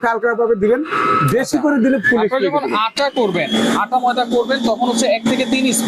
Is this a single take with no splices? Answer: yes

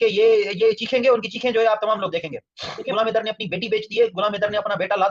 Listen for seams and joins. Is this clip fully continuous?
no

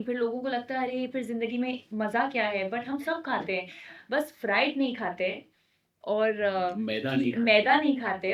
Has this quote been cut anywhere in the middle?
no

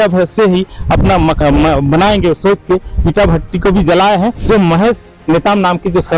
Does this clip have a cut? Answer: yes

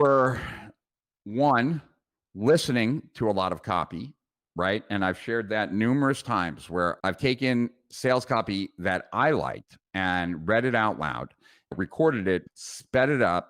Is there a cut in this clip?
yes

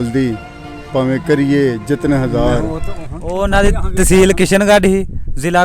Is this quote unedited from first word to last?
no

